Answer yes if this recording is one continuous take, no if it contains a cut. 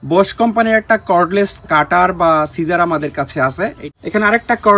no